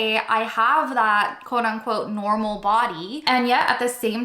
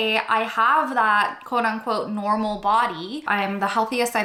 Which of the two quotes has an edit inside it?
first; 1 cut; at 3.2 s

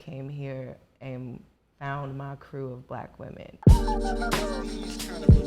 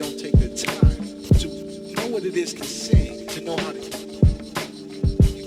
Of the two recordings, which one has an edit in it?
first; 1 cut; at 3.6 s

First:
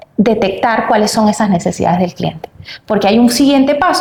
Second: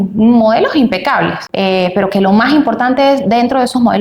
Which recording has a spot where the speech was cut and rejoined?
second; 1 cut; at 1.4 s

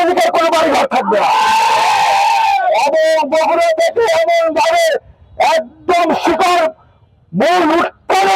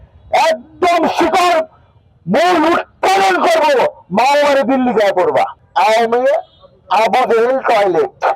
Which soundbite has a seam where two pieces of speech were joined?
second; 1 cut; at 5.6 s

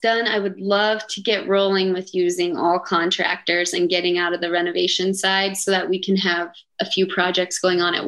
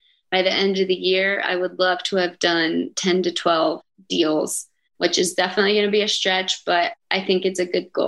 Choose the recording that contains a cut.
second; 1 cut; at 7.0 s

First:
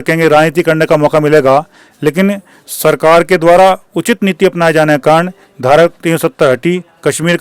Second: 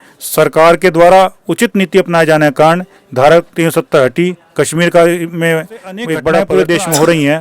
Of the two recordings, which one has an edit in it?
second; 1 cut; at 6.4 s

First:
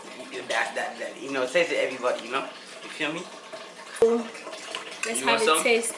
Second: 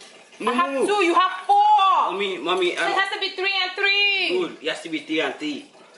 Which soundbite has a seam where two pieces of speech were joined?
first; 1 cut; at 4.0 s

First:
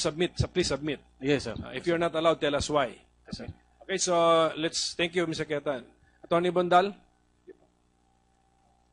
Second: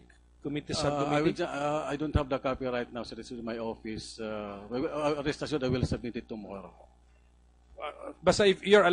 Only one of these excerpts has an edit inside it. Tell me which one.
second; 1 cut; at 4.5 s

